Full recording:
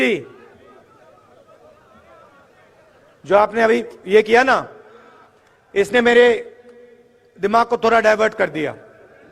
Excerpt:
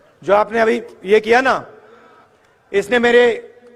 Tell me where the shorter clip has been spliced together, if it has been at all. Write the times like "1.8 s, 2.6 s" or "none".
none